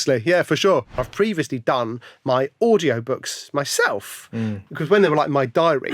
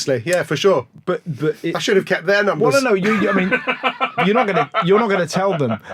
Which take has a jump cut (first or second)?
first